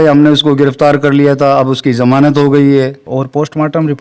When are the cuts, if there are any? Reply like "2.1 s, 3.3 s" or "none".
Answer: 3.0 s